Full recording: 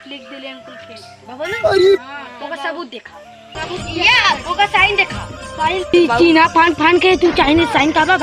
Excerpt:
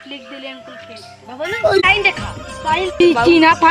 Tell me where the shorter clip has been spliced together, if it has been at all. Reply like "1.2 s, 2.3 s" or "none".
1.8 s